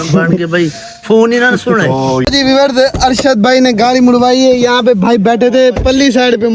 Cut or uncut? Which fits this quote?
cut